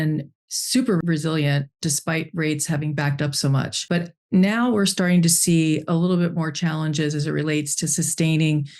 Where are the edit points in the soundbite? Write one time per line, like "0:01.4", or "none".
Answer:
0:01.0
0:03.8